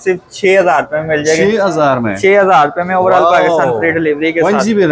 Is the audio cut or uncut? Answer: uncut